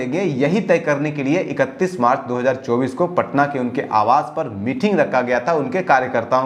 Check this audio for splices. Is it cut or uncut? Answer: uncut